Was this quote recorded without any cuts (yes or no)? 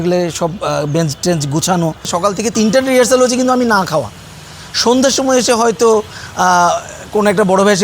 no